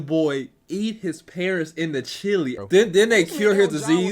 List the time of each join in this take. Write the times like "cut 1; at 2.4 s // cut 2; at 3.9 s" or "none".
cut 1; at 2.6 s

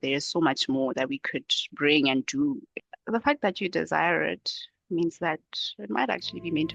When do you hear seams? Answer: cut 1; at 2.7 s

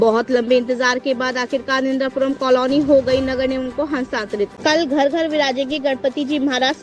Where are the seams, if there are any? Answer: cut 1; at 4.5 s

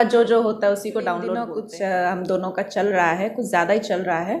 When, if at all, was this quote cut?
cut 1; at 1.4 s

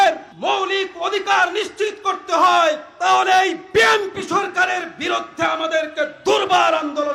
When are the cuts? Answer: none

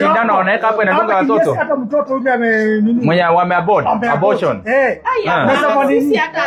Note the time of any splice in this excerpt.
none

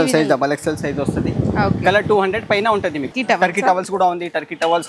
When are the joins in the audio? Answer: cut 1; at 3.1 s

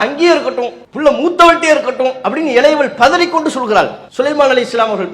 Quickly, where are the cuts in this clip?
cut 1; at 4.0 s

